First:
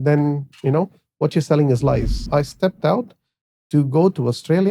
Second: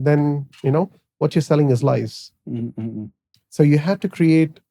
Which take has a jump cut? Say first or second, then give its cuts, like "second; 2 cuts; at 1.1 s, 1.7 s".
first; 1 cut; at 2.3 s